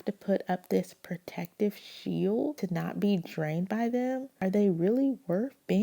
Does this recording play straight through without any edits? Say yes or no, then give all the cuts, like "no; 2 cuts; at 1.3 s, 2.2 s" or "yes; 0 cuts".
no; 2 cuts; at 2.6 s, 4.3 s